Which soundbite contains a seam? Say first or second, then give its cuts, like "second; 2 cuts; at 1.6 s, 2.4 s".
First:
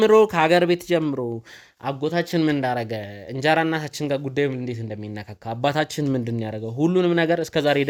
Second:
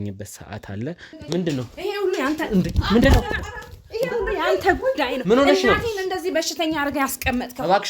second; 1 cut; at 1.1 s